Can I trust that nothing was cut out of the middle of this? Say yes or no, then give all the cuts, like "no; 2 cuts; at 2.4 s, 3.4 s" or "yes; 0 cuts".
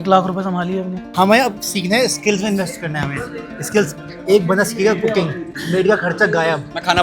no; 1 cut; at 1.0 s